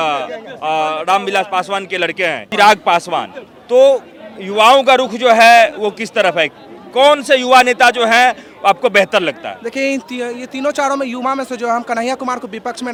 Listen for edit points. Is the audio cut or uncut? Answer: uncut